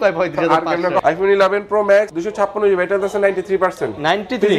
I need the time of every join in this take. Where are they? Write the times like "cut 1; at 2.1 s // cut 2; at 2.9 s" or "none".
cut 1; at 1.0 s // cut 2; at 2.2 s